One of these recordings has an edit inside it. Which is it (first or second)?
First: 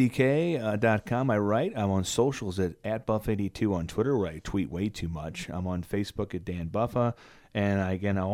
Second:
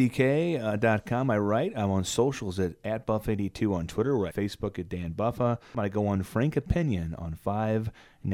second